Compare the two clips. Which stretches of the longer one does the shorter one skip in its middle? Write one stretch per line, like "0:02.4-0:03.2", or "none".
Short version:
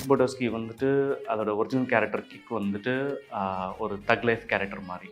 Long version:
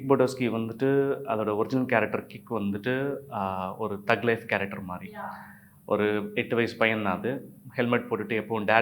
none